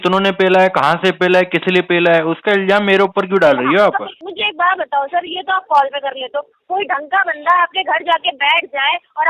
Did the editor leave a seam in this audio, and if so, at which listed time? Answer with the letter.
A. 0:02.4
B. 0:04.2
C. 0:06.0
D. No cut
B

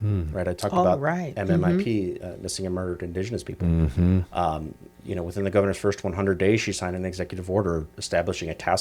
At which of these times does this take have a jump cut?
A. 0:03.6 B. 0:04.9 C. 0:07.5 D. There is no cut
D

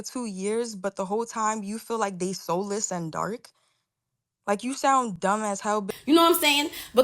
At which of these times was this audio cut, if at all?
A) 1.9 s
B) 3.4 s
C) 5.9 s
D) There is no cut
C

